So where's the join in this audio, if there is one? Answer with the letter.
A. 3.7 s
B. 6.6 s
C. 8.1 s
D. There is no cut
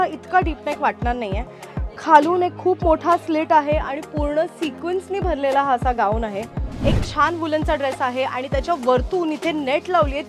B